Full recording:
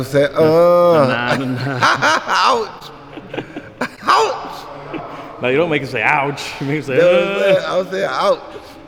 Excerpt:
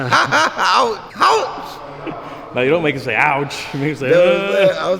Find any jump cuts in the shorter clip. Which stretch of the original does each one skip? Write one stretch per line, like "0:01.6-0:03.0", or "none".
0:02.8-0:04.0

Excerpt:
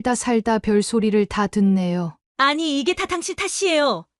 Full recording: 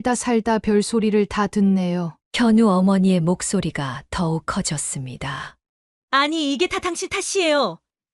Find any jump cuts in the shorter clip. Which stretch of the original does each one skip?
0:02.2-0:05.9

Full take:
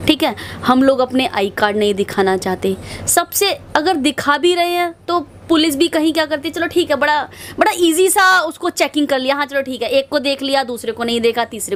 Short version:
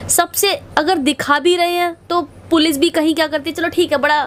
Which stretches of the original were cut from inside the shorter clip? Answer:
none

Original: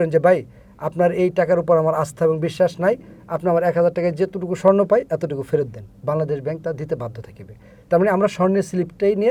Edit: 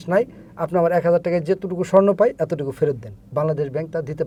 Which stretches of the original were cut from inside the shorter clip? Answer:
none

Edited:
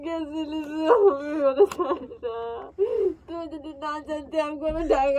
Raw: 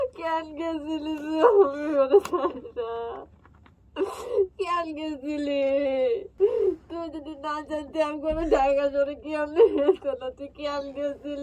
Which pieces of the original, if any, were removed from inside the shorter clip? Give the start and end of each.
0:03.2-0:06.3

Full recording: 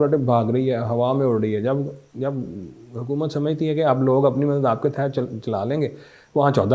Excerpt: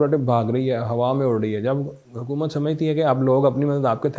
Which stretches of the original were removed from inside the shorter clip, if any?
0:02.0-0:02.8

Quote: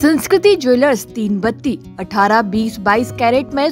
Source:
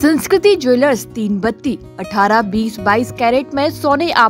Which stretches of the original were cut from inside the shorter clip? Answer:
none

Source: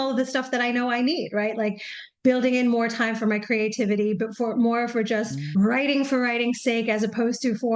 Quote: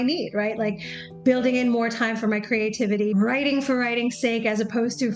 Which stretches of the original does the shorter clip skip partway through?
0:04.1-0:05.5

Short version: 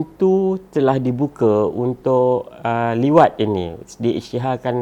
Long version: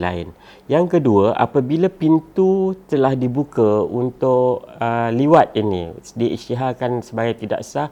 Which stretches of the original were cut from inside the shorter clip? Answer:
none

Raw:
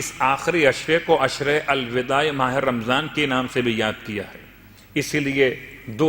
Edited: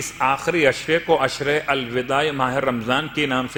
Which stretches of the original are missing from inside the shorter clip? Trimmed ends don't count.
none

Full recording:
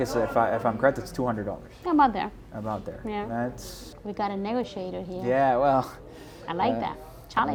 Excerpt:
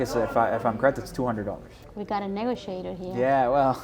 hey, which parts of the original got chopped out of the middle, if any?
0:01.7-0:03.7

